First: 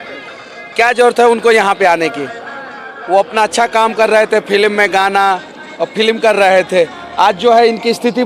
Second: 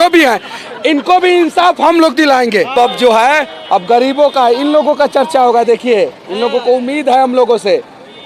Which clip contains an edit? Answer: second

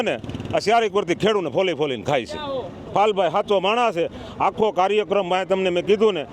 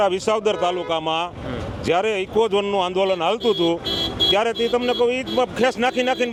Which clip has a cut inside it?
first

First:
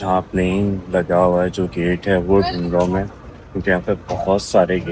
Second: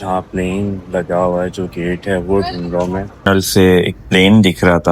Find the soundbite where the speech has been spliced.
second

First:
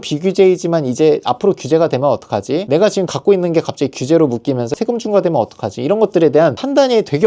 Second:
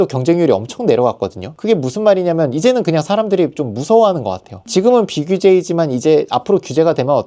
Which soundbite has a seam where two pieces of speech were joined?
first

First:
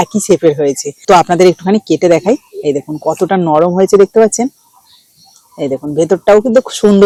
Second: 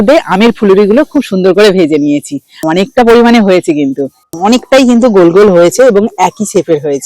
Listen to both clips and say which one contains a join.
second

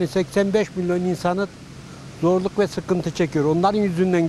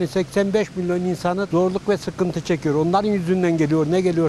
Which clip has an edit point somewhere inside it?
second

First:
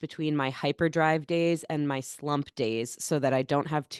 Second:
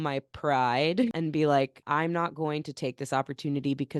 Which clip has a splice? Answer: second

